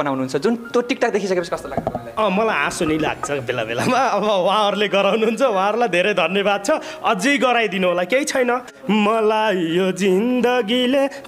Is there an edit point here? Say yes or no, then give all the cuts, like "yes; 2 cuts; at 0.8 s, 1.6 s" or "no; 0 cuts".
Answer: yes; 1 cut; at 8.7 s